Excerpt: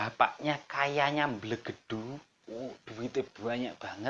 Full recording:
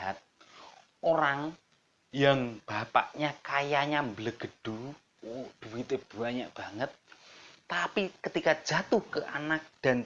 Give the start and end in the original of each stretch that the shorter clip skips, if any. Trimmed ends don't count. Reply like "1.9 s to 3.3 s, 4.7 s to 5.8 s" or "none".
none